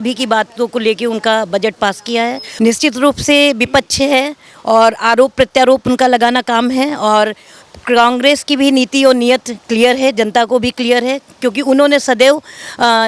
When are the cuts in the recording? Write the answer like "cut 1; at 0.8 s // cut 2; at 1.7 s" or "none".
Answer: cut 1; at 2.4 s

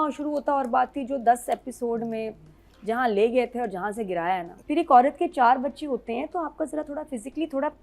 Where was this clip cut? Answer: cut 1; at 4.5 s

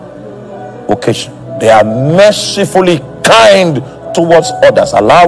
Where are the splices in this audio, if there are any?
none

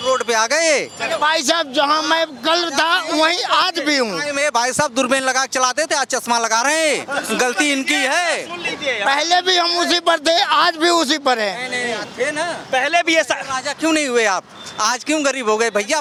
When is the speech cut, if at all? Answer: none

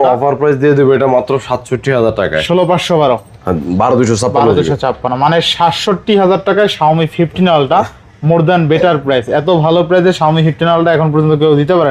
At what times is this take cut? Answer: none

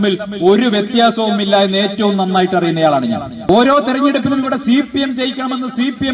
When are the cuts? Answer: cut 1; at 3.5 s

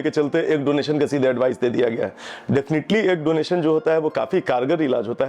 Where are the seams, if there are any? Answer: none

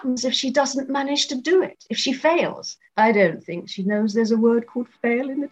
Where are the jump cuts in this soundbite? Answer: cut 1; at 2.9 s

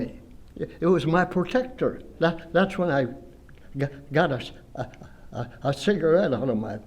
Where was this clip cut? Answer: cut 1; at 2.1 s

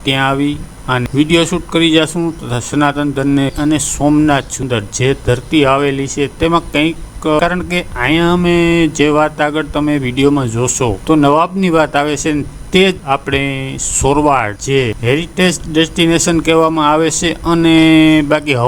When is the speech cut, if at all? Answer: cut 1; at 3.5 s // cut 2; at 7.4 s

